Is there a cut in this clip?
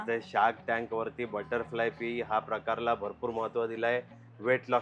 no; 0 cuts

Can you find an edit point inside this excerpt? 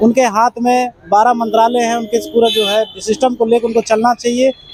no; 0 cuts

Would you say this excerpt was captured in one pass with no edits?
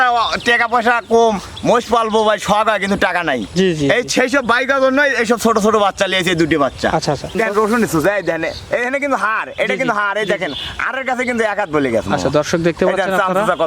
no; 1 cut; at 7.3 s

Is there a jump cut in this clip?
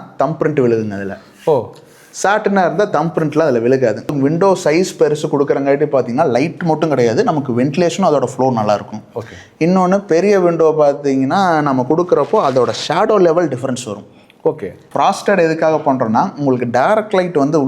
yes; 2 cuts; at 4.1 s, 14.8 s

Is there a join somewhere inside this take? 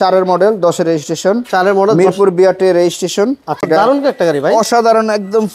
yes; 1 cut; at 3.7 s

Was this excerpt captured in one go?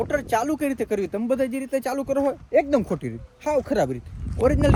yes; 0 cuts

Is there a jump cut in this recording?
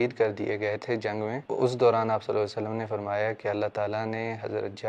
yes; 1 cut; at 1.4 s

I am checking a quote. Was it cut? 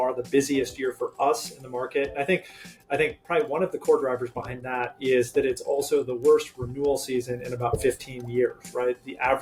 no; 0 cuts

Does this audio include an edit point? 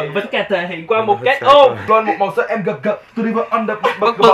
yes; 1 cut; at 1.8 s

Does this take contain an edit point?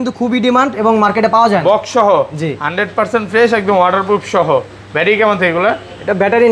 no; 0 cuts

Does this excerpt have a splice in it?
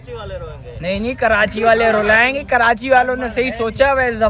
no; 0 cuts

